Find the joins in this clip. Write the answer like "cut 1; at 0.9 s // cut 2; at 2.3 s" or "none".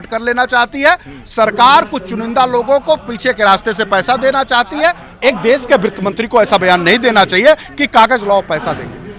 cut 1; at 5.1 s